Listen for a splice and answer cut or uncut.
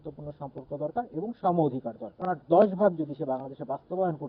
cut